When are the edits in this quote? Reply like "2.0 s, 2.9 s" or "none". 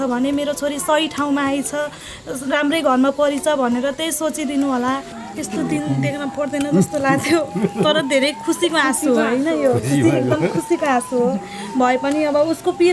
5.2 s